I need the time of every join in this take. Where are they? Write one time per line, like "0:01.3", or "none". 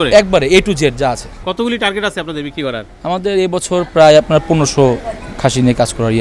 0:01.3